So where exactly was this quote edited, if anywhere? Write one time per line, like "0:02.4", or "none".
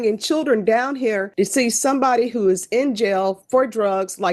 0:01.3